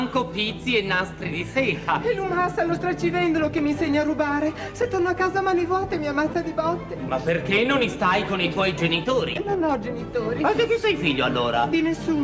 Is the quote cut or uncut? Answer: uncut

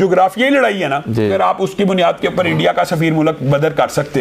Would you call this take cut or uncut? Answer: cut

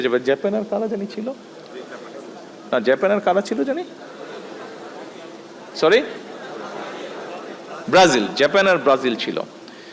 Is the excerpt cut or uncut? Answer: uncut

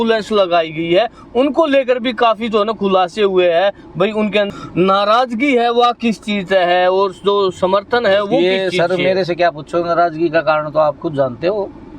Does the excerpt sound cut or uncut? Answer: cut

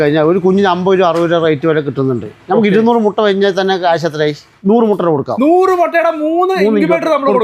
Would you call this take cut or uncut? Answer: cut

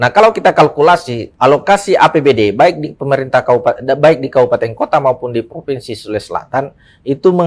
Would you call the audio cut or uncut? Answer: cut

